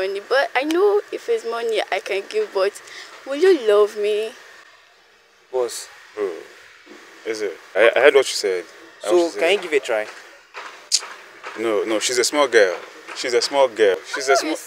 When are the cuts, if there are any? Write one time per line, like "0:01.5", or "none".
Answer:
none